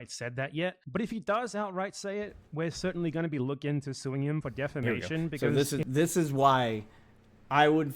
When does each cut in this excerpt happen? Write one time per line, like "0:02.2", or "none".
0:05.4